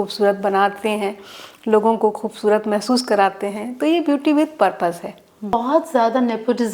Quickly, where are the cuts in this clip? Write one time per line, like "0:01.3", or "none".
0:05.5

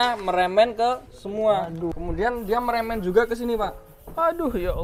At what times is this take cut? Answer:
0:01.9

